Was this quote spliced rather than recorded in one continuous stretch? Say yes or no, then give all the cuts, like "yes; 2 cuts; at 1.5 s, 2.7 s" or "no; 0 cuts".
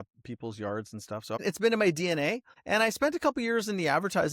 yes; 2 cuts; at 1.4 s, 2.5 s